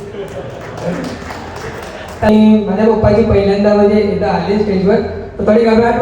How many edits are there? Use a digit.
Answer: 1